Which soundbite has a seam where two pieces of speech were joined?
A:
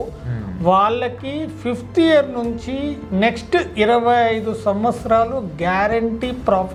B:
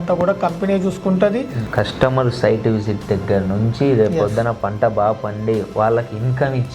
B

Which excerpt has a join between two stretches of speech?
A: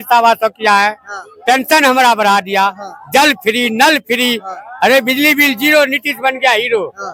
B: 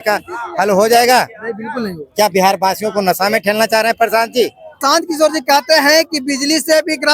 B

